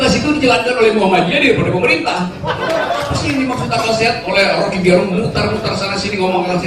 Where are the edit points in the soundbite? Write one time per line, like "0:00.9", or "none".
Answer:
0:03.1